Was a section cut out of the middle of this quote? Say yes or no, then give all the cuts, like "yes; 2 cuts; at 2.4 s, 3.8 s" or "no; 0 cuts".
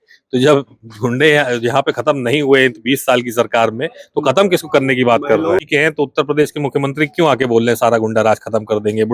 yes; 1 cut; at 5.7 s